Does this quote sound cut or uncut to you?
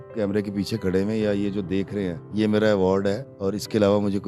cut